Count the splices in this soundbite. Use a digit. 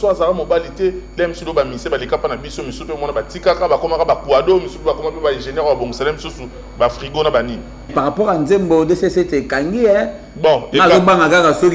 1